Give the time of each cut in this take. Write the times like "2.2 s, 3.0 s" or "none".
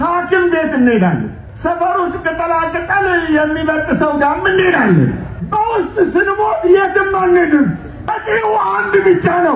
none